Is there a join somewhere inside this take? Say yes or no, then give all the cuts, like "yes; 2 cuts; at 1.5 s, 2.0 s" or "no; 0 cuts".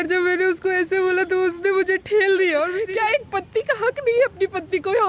yes; 1 cut; at 2.8 s